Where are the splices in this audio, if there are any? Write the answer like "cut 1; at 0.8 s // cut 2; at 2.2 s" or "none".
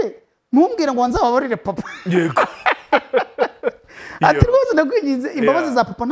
none

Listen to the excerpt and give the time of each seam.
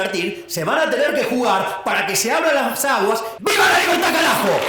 cut 1; at 3.3 s

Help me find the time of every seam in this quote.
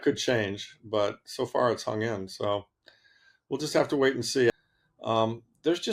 cut 1; at 4.5 s

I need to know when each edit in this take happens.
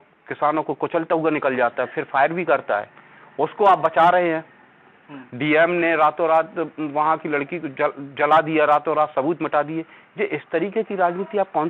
none

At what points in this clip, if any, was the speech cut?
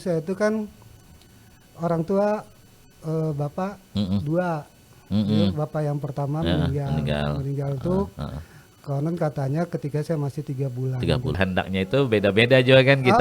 cut 1; at 11.4 s

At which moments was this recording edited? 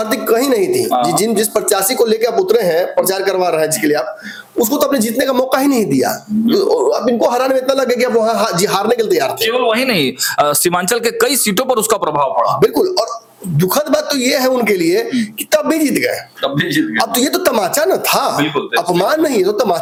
none

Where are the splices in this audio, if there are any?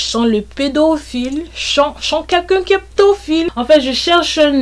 cut 1; at 3.5 s

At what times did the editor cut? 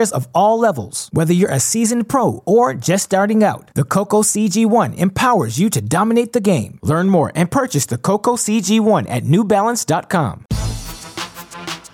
cut 1; at 10.7 s

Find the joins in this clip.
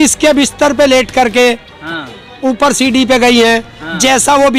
none

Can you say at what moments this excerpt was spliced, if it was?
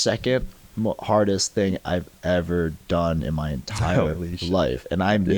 none

